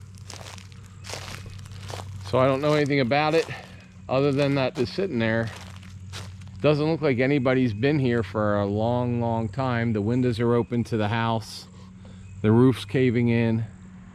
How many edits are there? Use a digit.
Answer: 1